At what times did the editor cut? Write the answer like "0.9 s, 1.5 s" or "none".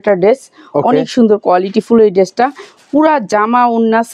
none